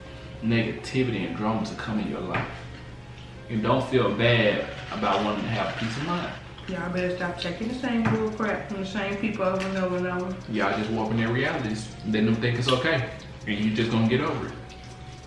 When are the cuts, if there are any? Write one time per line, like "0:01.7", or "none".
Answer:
0:06.5